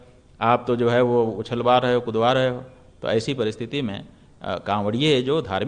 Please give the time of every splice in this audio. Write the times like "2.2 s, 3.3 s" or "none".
none